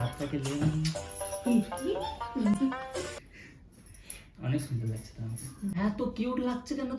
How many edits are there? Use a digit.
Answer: 0